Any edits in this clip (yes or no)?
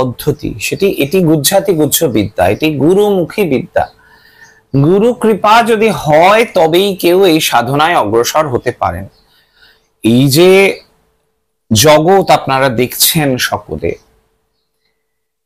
no